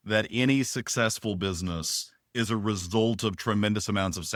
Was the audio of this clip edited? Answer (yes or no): no